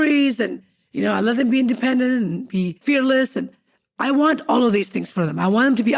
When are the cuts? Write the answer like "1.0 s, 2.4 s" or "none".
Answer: 2.8 s